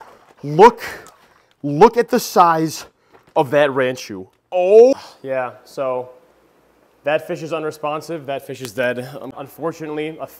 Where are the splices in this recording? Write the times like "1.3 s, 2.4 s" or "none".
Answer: 4.9 s, 9.3 s